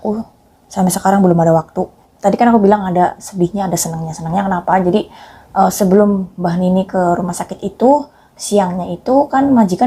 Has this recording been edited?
yes; 1 cut; at 2.1 s

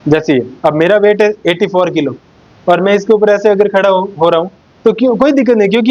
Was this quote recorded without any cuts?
yes; 0 cuts

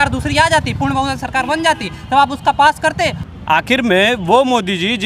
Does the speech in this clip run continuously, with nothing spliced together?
no; 1 cut; at 3.2 s

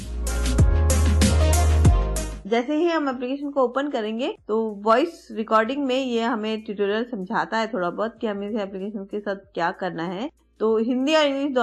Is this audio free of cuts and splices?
yes; 0 cuts

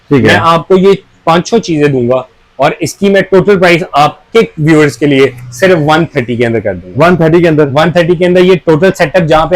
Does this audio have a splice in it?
no; 0 cuts

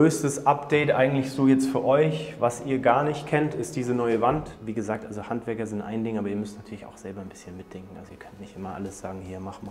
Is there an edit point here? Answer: yes; 1 cut; at 4.6 s

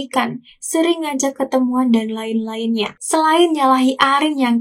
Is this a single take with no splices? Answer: no; 1 cut; at 3.0 s

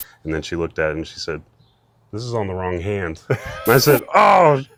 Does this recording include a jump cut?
no; 0 cuts

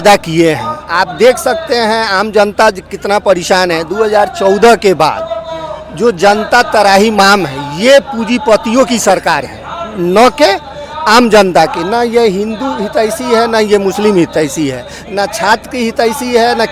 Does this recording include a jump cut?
no; 0 cuts

